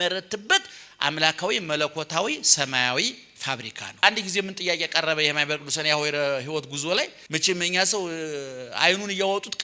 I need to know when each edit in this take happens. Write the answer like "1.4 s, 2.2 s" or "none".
4.0 s, 7.2 s

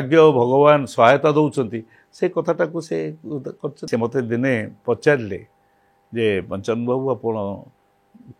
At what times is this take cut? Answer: 3.8 s

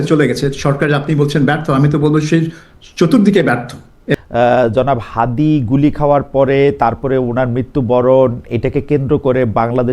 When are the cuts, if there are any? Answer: 4.1 s

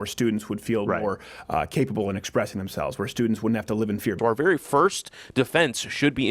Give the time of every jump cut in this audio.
4.2 s

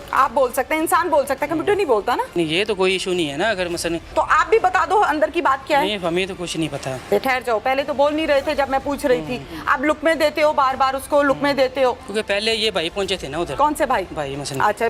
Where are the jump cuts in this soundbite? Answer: 2.3 s, 4.1 s, 7.1 s, 12.1 s

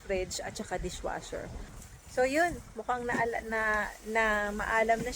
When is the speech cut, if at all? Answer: 1.7 s

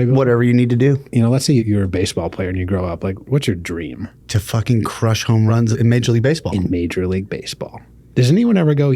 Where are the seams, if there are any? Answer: 1.6 s, 3.3 s, 4.1 s, 5.6 s

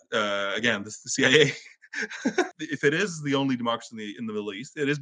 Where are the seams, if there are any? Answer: 2.5 s

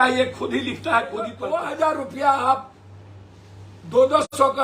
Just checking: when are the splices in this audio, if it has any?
1.4 s

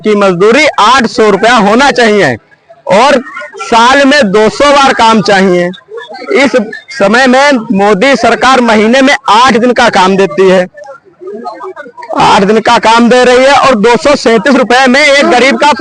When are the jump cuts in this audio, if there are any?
none

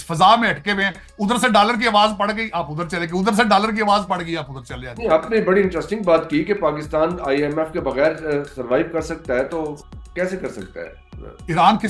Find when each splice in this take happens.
none

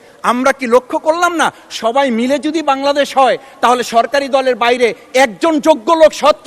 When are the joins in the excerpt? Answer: none

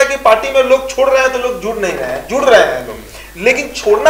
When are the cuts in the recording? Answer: none

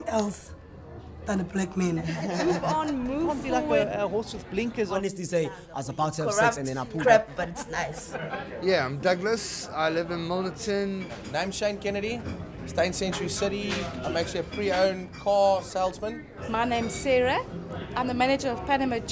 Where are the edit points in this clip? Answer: 13.6 s

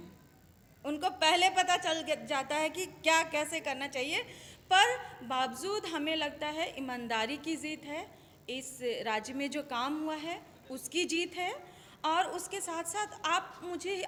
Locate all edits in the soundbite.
none

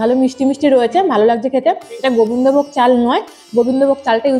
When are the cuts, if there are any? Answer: none

